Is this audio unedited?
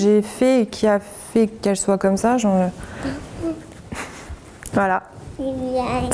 no; 1 cut; at 4.7 s

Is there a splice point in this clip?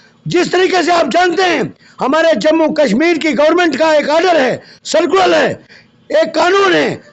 no; 0 cuts

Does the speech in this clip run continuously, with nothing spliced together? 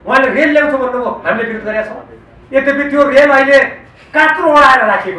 yes; 0 cuts

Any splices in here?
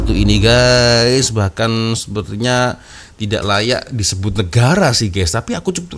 no; 0 cuts

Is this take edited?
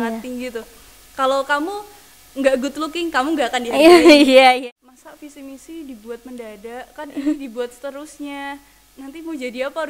yes; 1 cut; at 4.6 s

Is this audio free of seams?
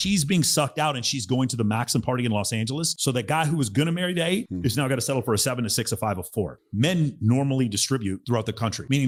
yes; 0 cuts

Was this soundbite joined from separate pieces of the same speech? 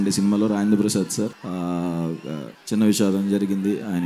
yes; 2 cuts; at 1.4 s, 2.5 s

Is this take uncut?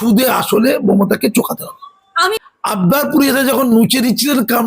no; 1 cut; at 2.3 s

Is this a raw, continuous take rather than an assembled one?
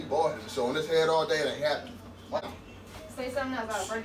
no; 1 cut; at 2.4 s

